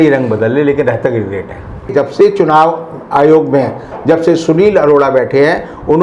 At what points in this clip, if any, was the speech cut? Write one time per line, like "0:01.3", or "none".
0:01.9